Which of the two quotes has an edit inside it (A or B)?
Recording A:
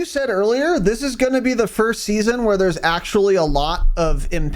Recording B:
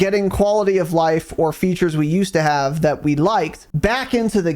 B